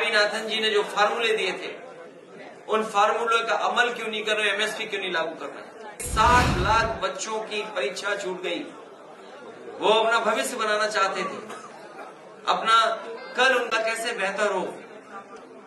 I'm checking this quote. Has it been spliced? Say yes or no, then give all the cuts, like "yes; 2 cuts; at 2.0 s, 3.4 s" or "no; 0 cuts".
yes; 1 cut; at 6.0 s